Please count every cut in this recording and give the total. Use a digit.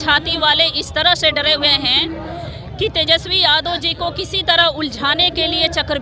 0